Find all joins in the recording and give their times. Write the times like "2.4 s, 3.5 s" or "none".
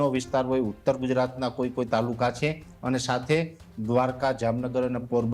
none